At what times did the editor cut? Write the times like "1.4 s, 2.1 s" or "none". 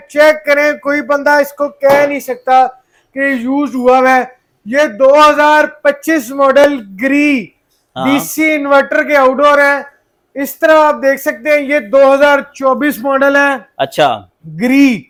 none